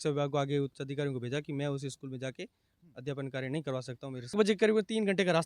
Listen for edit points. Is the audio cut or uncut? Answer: cut